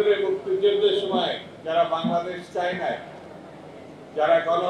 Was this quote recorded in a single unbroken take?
yes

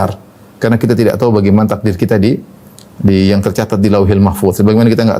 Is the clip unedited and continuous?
yes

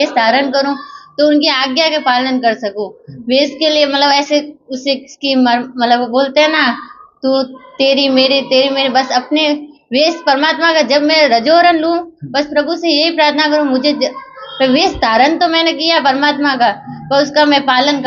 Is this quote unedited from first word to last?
yes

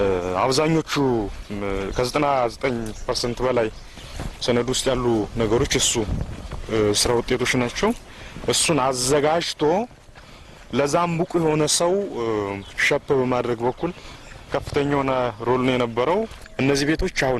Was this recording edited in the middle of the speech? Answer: yes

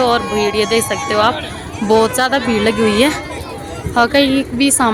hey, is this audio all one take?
yes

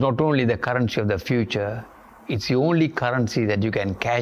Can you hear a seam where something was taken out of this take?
no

